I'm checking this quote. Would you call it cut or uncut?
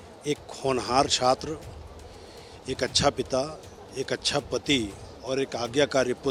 uncut